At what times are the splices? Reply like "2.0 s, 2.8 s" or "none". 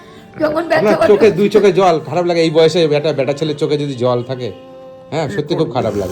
none

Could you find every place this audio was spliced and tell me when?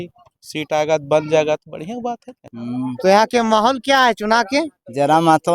2.6 s

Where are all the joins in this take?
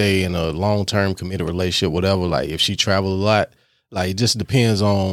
none

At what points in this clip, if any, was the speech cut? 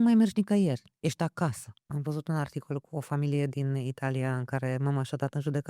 1.7 s

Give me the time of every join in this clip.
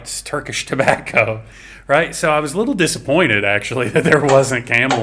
none

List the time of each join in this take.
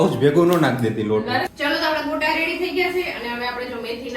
1.5 s

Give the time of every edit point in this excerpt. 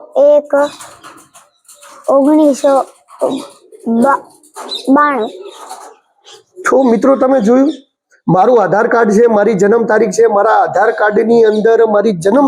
none

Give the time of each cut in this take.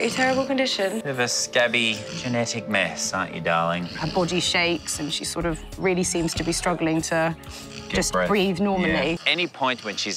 1.0 s, 4.0 s, 9.2 s

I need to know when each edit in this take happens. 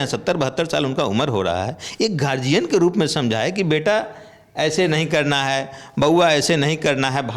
none

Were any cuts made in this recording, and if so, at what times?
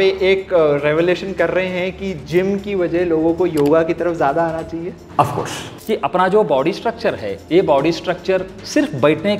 5.7 s

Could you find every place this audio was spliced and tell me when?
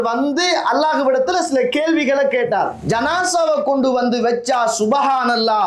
2.8 s

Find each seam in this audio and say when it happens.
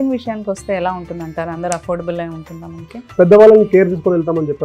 3.0 s

